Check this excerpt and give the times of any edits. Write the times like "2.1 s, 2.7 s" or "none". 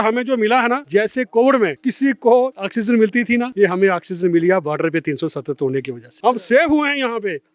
0.8 s, 1.8 s, 2.9 s, 6.0 s